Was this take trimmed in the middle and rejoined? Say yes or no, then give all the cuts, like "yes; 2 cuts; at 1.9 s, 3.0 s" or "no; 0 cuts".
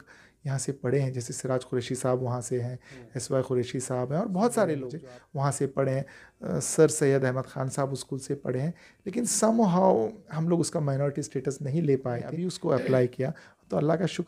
yes; 2 cuts; at 4.9 s, 12.5 s